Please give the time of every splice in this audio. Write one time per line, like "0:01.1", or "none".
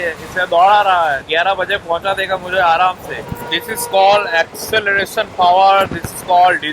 0:01.2